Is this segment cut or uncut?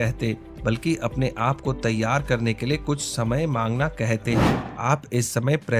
cut